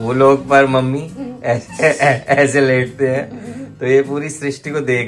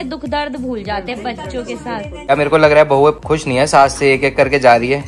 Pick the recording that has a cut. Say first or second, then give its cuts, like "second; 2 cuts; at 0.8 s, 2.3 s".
second; 2 cuts; at 2.3 s, 3.2 s